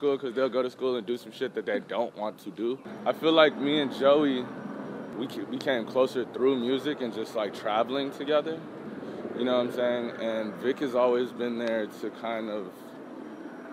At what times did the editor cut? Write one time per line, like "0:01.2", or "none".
0:02.9

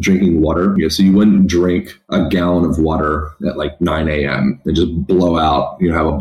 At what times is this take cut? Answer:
0:00.7
0:02.0

